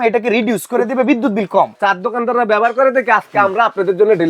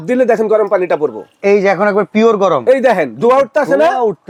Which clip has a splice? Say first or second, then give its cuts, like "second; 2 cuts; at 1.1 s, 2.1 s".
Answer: first; 1 cut; at 1.7 s